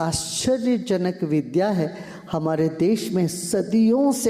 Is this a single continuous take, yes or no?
yes